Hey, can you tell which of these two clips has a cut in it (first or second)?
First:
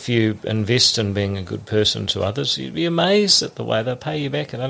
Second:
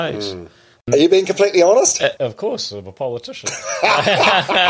second